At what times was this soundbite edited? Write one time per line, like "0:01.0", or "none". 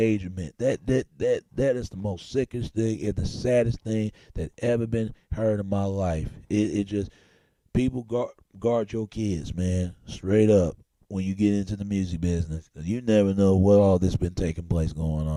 none